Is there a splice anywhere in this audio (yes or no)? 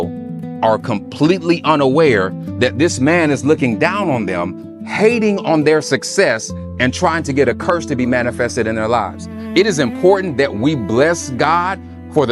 yes